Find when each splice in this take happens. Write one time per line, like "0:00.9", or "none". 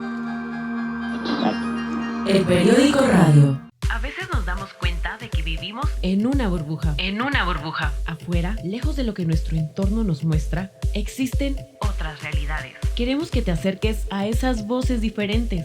0:03.7